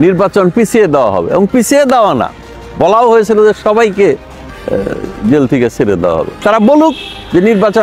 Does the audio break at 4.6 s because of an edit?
no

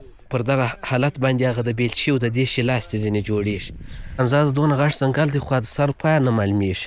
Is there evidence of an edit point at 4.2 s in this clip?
yes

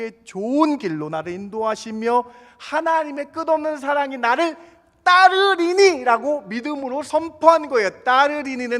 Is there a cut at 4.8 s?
no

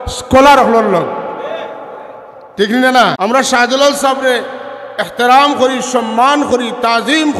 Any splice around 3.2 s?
yes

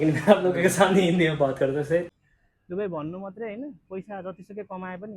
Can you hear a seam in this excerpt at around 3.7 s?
no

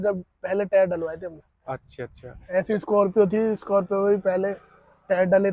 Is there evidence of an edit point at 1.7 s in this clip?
no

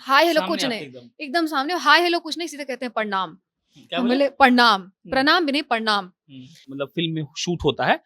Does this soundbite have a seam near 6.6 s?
yes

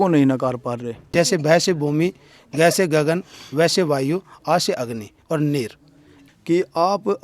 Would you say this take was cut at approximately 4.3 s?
no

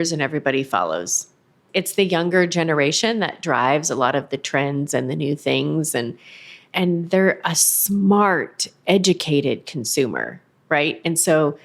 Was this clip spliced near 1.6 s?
yes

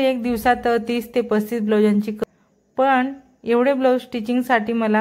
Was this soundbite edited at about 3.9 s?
no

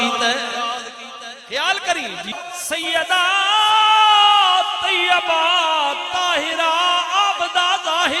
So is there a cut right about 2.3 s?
yes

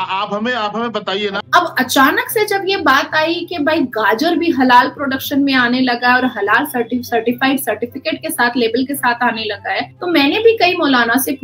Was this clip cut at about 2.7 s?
no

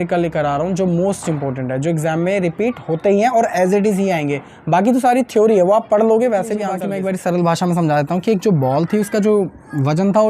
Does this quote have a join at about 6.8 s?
yes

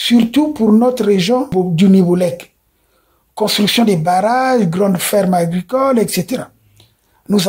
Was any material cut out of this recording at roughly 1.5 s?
yes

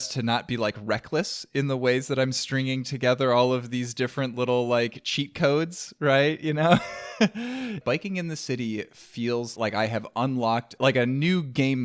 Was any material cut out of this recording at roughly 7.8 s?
yes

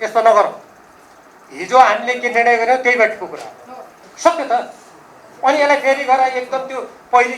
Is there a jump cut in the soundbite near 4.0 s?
yes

